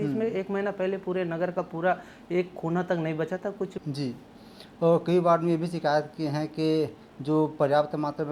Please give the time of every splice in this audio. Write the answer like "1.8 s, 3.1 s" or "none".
3.8 s

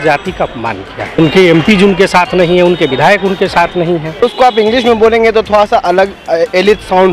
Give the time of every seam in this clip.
1.2 s, 4.2 s

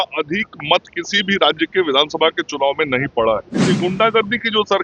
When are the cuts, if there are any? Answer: 3.6 s

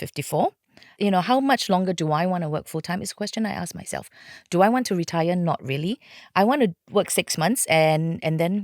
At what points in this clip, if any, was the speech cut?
1.0 s

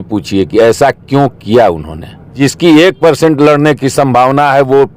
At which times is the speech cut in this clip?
2.3 s

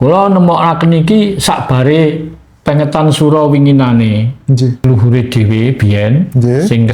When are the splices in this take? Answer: 4.8 s

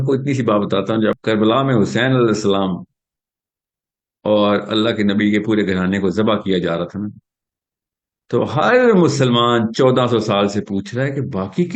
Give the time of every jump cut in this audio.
1.2 s

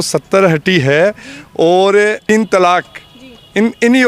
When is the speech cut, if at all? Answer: 2.3 s

